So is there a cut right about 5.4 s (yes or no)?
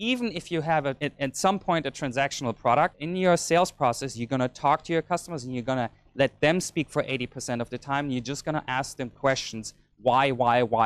no